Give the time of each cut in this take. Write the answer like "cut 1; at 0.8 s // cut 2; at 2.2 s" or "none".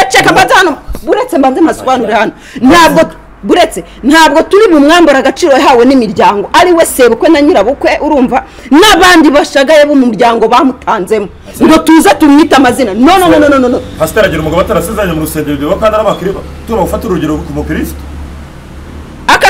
none